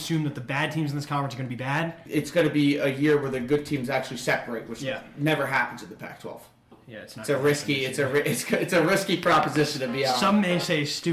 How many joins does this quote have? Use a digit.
2